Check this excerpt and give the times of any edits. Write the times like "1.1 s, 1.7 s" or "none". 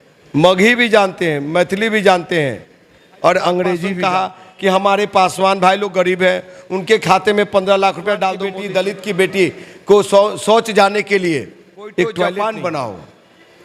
3.9 s, 8.5 s, 12.3 s